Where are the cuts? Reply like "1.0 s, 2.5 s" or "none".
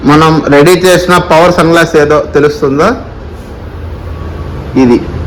none